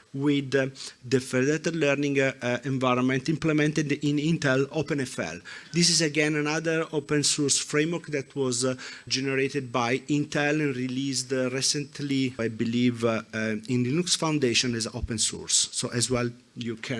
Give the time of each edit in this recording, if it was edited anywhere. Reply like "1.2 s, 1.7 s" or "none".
4.7 s, 9.1 s, 12.4 s